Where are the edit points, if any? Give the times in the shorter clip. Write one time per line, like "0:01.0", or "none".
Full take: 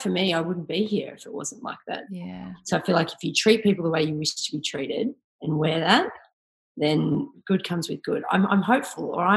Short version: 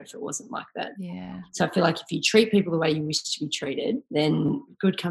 0:04.0